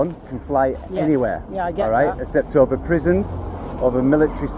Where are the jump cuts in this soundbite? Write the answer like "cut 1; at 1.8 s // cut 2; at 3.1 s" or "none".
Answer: none

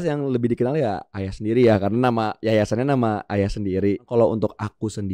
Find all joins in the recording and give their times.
cut 1; at 4.1 s

